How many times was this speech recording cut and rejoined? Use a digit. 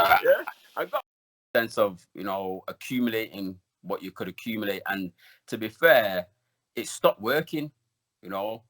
1